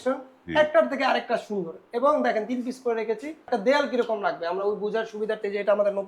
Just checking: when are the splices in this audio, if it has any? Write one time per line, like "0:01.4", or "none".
0:03.5